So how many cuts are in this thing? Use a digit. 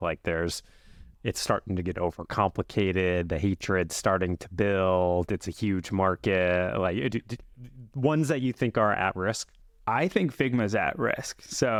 0